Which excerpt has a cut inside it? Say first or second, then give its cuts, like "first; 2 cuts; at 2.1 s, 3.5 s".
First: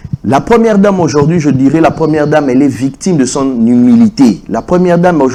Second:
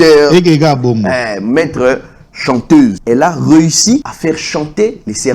second; 2 cuts; at 3.0 s, 4.1 s